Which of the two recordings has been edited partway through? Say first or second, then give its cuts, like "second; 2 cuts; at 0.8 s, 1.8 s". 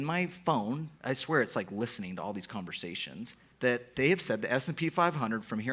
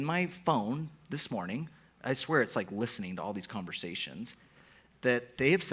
first; 2 cuts; at 0.9 s, 3.4 s